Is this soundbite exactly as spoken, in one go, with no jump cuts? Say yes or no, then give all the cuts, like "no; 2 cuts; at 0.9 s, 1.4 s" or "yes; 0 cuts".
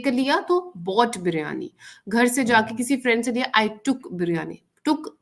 yes; 0 cuts